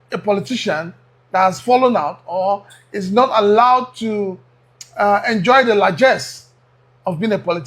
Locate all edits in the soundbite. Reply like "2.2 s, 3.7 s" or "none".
none